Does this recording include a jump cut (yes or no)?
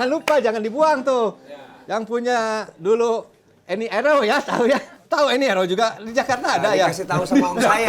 yes